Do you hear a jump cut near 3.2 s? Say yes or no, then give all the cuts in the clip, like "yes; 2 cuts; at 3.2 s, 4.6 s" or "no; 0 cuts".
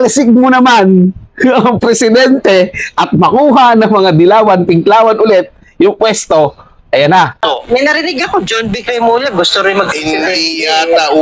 no; 1 cut; at 7.4 s